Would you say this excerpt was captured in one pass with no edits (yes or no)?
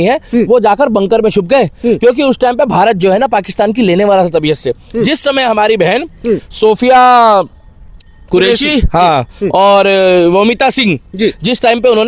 yes